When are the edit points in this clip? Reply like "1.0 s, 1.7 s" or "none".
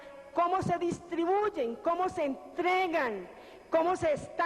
2.2 s